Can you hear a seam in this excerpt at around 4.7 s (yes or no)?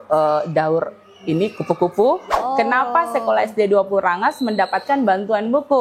no